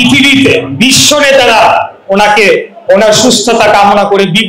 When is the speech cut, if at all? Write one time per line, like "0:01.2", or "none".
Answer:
none